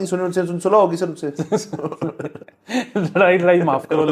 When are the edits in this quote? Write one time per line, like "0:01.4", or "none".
none